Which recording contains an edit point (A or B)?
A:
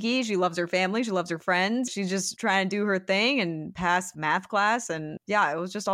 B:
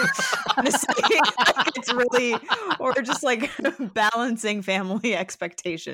A